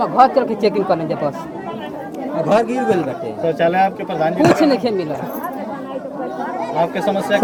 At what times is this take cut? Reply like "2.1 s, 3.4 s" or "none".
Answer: none

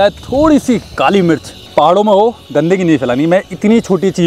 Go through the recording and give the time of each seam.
1.6 s

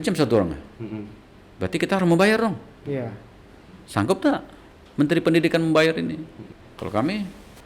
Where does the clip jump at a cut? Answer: none

